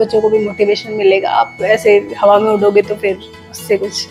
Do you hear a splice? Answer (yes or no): no